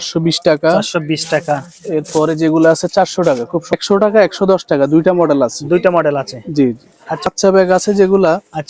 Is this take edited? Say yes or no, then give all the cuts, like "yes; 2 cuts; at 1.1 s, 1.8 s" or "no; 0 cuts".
yes; 2 cuts; at 3.7 s, 7.2 s